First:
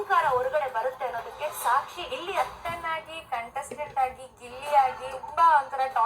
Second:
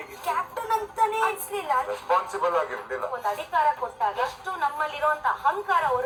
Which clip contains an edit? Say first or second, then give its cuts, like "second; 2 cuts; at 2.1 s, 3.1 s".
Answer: first; 1 cut; at 1.4 s